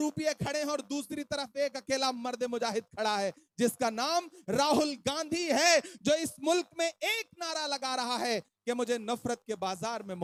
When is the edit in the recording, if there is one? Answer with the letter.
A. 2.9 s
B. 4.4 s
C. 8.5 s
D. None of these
D